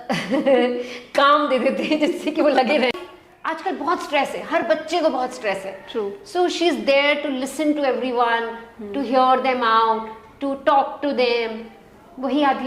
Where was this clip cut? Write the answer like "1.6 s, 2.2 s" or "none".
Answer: 2.9 s